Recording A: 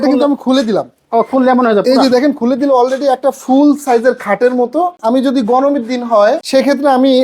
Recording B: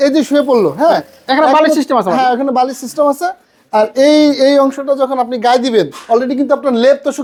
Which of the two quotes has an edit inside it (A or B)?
A